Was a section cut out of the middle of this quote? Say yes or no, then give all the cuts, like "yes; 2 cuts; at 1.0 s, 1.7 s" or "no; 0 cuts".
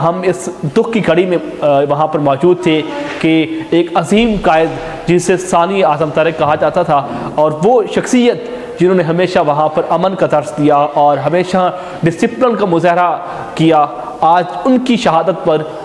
no; 0 cuts